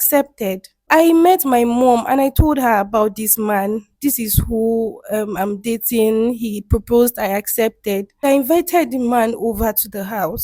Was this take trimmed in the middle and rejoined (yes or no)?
yes